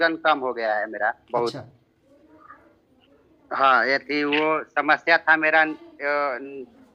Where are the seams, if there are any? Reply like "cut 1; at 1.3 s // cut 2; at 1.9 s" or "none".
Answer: none

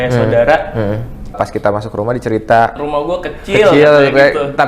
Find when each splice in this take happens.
cut 1; at 1.4 s // cut 2; at 2.7 s

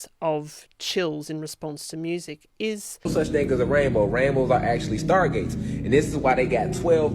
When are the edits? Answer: cut 1; at 3.1 s

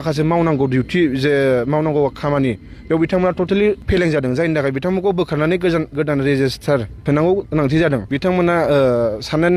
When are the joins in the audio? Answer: cut 1; at 3.8 s // cut 2; at 6.9 s // cut 3; at 8.1 s

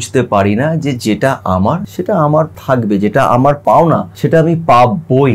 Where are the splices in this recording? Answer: cut 1; at 2.2 s // cut 2; at 3.7 s

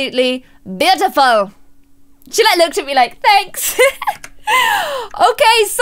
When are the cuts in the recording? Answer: none

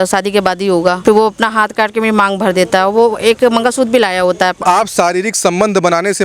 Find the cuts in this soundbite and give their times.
cut 1; at 1.0 s // cut 2; at 4.6 s

